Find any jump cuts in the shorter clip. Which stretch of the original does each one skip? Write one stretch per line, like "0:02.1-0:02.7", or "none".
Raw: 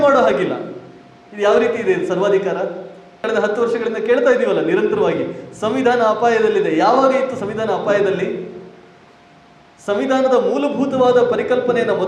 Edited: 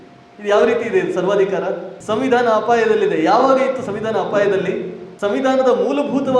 0:02.9-0:05.5
0:08.5-0:09.7